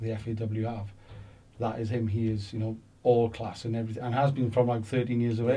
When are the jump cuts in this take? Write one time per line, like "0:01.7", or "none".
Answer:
none

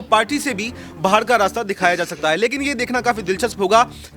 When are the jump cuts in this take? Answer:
none

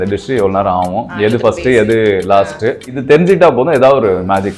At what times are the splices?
0:02.9

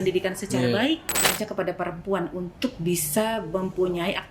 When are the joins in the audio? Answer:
0:01.3

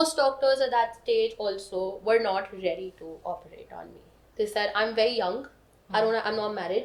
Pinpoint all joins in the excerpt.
none

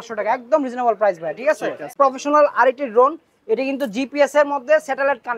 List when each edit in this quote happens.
0:01.9

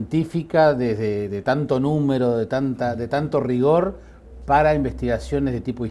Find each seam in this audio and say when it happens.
0:03.1

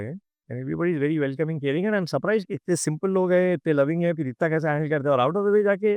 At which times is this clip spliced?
none

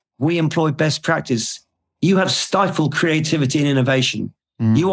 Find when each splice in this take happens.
none

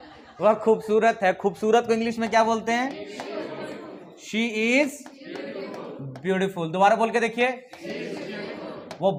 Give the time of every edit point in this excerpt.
none

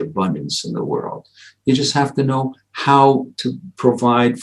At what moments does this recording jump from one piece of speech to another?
none

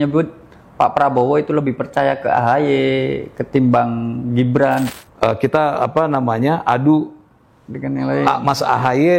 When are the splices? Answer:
0:04.9

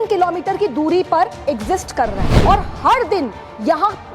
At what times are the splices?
0:02.3

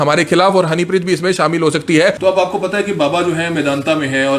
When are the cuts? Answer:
0:02.2

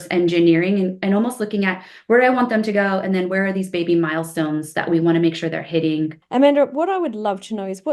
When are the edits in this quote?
0:06.2

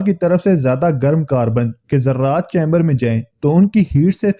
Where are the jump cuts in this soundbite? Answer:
none

